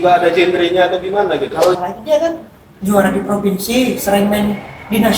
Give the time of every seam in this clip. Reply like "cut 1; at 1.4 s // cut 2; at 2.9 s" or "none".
cut 1; at 1.8 s